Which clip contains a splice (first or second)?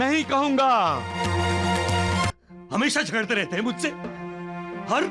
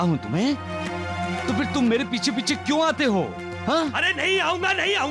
first